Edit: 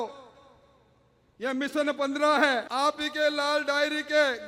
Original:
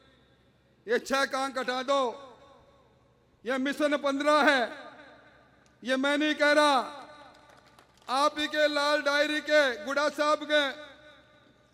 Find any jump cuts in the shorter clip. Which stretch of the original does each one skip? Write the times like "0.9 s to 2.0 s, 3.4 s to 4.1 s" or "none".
4.7 s to 8.1 s